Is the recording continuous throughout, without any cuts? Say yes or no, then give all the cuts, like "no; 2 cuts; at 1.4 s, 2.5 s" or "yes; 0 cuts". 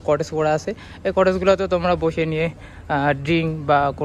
yes; 0 cuts